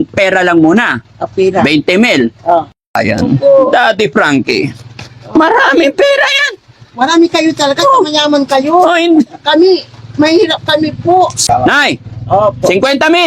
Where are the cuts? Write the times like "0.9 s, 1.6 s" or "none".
2.8 s, 11.4 s